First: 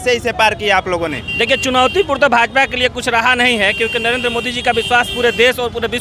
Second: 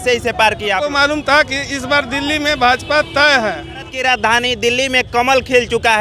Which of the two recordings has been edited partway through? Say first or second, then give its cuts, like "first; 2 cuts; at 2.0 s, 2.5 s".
second; 2 cuts; at 0.9 s, 3.9 s